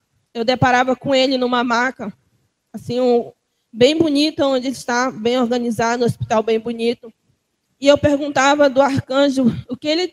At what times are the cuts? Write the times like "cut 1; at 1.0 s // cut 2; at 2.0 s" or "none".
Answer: none